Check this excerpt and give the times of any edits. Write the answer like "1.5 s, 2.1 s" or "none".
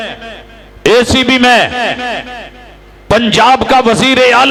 none